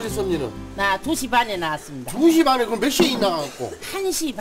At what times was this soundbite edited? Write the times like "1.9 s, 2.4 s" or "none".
none